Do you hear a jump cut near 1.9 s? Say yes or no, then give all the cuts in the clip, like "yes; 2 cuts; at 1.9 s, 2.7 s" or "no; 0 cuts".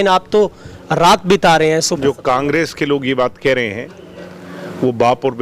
yes; 1 cut; at 1.9 s